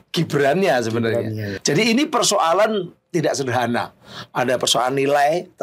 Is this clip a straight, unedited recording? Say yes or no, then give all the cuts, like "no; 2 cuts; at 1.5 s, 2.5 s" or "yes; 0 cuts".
no; 1 cut; at 1.5 s